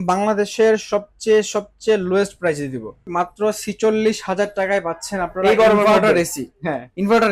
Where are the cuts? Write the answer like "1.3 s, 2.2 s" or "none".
3.1 s